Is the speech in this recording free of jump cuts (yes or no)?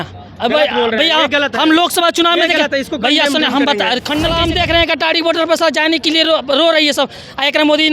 no